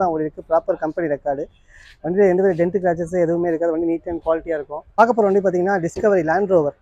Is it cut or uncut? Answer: cut